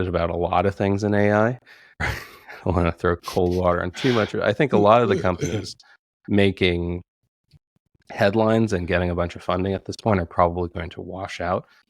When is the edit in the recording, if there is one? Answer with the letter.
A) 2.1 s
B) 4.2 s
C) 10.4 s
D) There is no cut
A